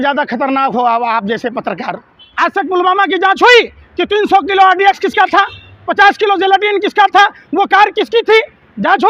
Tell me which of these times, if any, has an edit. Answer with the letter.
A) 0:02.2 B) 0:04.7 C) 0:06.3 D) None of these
A